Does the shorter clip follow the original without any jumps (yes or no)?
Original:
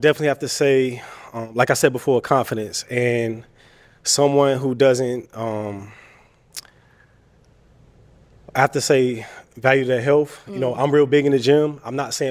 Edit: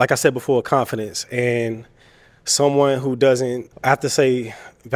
no